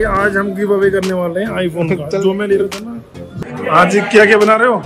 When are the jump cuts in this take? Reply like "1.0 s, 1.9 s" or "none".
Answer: 3.3 s